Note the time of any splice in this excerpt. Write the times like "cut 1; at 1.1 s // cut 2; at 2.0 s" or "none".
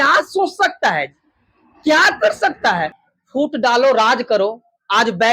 cut 1; at 3.0 s

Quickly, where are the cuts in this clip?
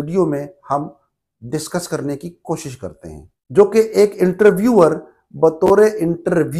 cut 1; at 3.4 s

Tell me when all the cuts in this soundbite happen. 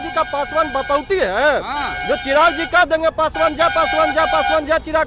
none

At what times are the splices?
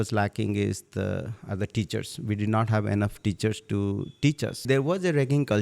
cut 1; at 4.6 s

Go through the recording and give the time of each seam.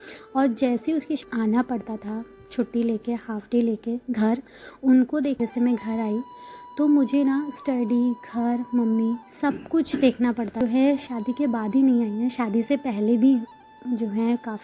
cut 1; at 1.2 s // cut 2; at 5.4 s // cut 3; at 10.6 s

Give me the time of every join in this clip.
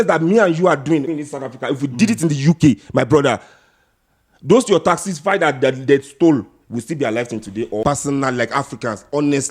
cut 1; at 1.0 s // cut 2; at 7.8 s

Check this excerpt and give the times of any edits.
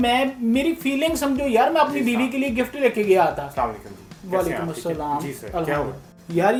none

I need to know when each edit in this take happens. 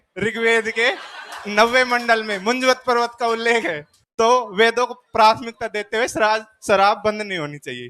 none

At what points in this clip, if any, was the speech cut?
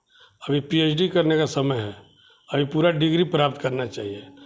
none

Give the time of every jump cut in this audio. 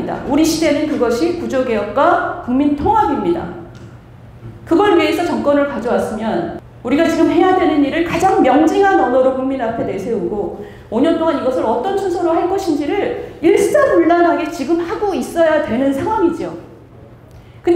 cut 1; at 6.6 s

